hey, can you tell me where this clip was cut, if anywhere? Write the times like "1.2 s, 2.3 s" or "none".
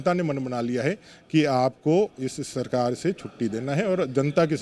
none